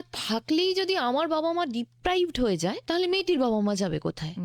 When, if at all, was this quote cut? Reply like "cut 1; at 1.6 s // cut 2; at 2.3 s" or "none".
cut 1; at 2.8 s